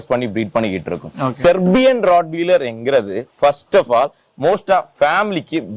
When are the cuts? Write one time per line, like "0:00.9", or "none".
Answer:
none